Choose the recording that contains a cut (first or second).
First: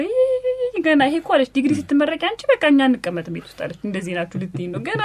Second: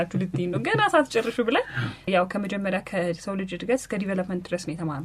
second